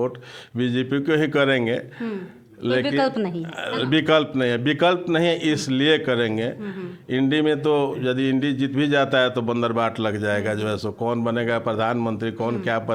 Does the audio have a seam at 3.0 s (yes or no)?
no